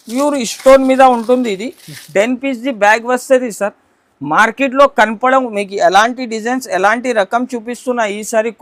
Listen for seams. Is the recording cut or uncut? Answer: uncut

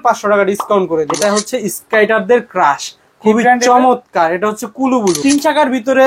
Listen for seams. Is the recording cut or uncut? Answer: cut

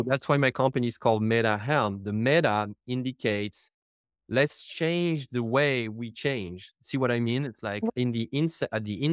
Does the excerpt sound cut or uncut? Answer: cut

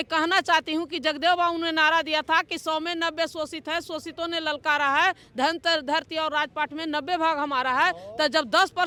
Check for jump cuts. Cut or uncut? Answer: uncut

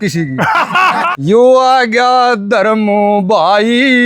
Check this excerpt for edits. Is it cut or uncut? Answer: cut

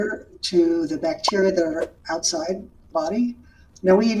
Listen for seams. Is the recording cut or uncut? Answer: cut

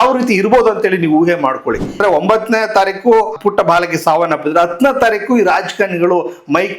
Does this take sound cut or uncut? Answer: cut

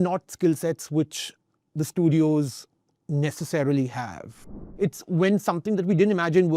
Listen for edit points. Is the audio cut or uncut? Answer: cut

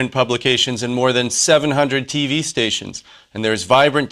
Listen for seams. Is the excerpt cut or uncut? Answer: cut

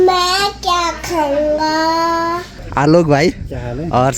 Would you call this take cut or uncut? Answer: cut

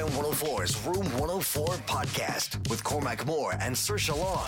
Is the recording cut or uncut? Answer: uncut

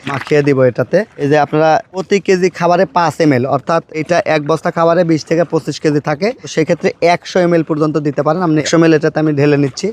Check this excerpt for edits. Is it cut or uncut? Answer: uncut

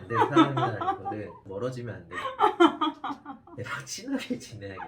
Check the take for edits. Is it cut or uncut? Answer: uncut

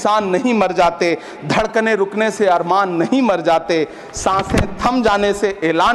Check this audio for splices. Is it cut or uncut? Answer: uncut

